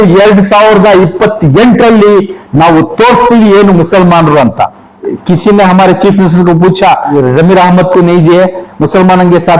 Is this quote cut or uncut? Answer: cut